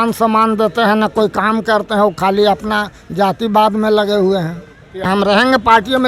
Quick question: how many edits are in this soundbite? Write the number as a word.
one